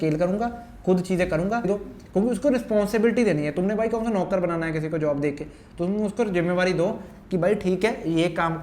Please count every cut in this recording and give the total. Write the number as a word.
one